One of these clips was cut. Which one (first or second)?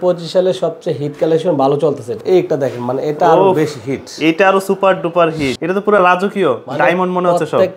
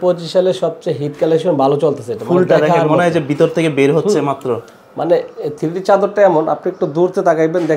first